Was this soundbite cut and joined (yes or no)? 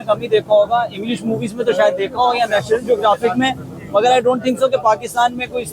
no